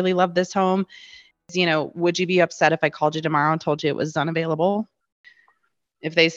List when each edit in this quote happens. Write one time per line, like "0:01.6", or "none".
0:01.4
0:05.2